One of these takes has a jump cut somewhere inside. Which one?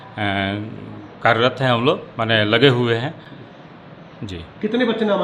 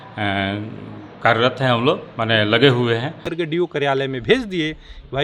second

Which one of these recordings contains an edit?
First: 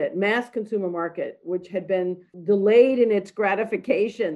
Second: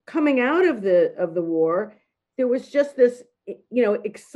first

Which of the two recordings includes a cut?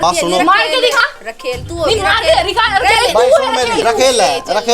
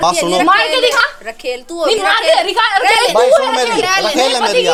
first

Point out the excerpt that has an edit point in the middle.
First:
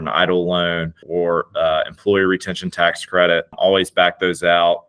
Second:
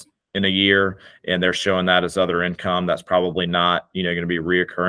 first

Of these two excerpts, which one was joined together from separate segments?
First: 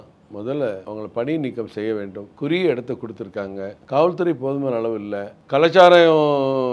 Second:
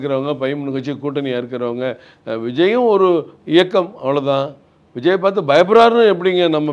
first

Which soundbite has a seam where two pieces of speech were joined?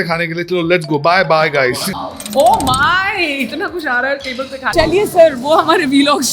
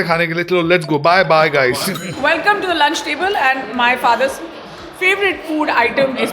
first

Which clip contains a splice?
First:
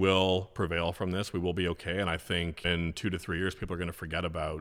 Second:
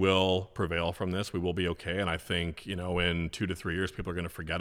first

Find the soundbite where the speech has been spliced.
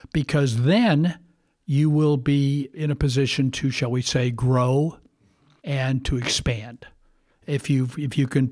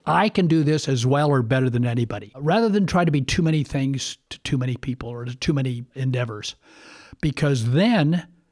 second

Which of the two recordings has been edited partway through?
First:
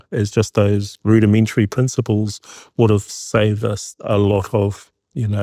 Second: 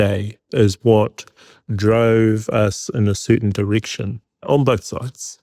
second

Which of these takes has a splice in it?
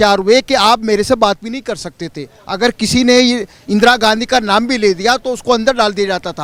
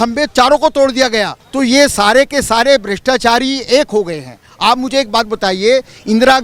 second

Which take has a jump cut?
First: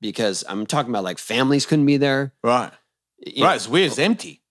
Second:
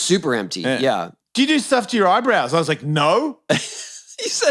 second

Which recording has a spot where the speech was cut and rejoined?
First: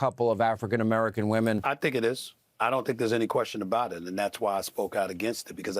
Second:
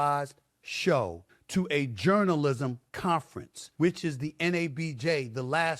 first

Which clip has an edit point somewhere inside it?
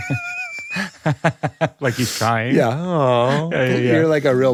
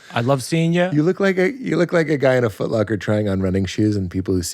second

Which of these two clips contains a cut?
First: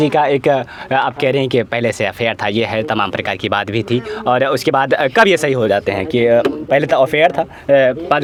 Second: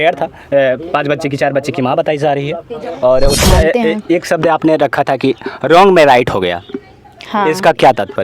second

